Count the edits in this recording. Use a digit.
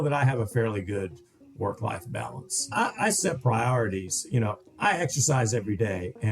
1